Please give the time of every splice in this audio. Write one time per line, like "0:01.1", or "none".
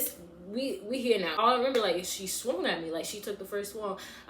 0:01.3